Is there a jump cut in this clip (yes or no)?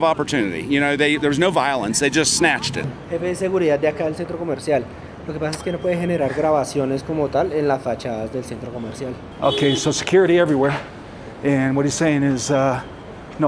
yes